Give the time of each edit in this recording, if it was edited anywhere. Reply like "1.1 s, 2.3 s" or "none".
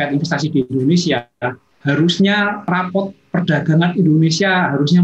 2.7 s

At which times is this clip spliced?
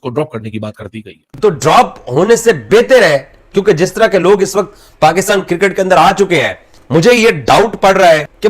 1.2 s

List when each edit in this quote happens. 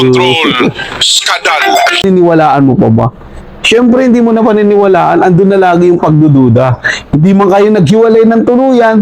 2.0 s

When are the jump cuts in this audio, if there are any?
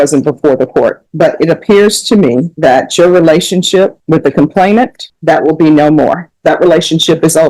1.0 s, 2.5 s, 4.0 s, 5.1 s, 6.3 s

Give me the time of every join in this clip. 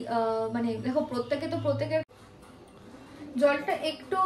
2.0 s

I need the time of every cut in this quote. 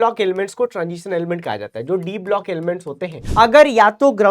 3.2 s

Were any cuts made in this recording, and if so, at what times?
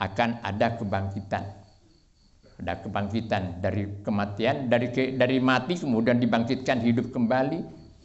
none

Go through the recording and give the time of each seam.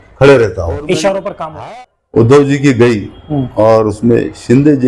1.4 s

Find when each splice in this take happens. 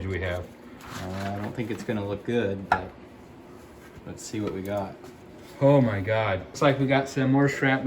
6.5 s

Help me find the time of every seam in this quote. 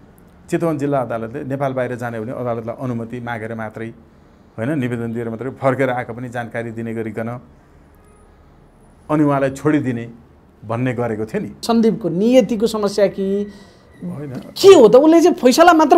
11.6 s

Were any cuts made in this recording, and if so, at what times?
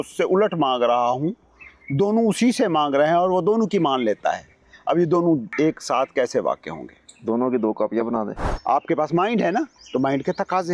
5.5 s, 8.4 s

